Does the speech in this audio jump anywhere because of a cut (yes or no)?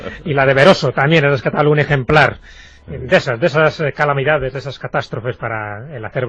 no